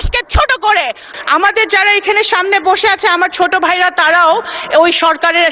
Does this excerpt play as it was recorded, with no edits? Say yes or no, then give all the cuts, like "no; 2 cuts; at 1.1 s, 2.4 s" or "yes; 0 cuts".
no; 1 cut; at 1.1 s